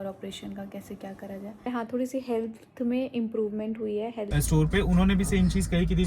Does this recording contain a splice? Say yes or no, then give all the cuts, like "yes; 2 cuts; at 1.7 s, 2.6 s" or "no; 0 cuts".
yes; 2 cuts; at 1.7 s, 4.3 s